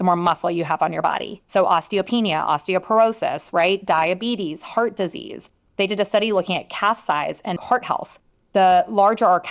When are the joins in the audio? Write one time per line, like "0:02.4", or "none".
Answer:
0:07.6